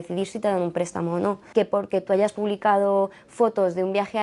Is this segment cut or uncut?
cut